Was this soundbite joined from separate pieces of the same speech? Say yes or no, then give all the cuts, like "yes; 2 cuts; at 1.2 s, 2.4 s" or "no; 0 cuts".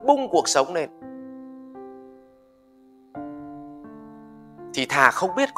yes; 3 cuts; at 0.9 s, 2.7 s, 4.7 s